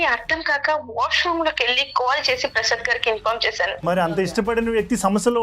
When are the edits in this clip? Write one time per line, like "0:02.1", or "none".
0:03.8